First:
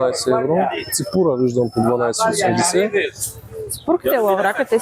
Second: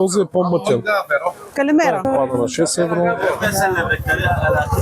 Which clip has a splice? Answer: second; 1 cut; at 2.1 s

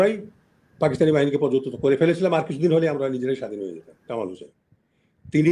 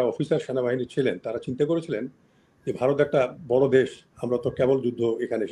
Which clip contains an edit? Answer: first; 1 cut; at 4.0 s

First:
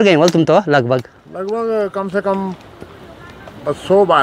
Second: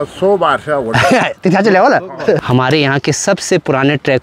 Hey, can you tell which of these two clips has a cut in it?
second; 1 cut; at 2.4 s

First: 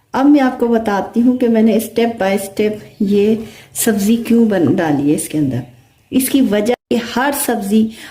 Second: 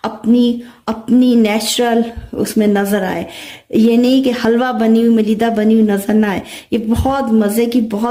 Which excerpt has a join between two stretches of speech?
first; 1 cut; at 6.8 s

